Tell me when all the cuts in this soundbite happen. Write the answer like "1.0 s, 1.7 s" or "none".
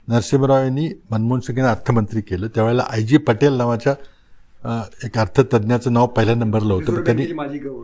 none